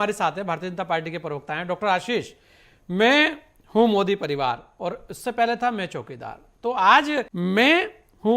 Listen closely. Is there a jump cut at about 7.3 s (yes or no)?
yes